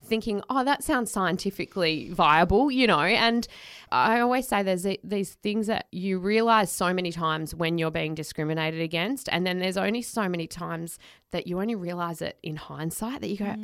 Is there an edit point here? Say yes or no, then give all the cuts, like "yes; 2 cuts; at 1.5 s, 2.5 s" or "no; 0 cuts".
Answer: yes; 2 cuts; at 3.8 s, 5.9 s